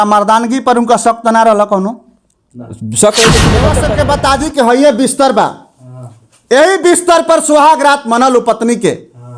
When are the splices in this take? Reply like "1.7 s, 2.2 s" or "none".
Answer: 3.8 s